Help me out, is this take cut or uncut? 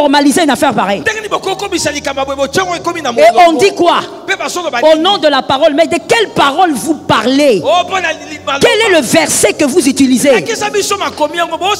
uncut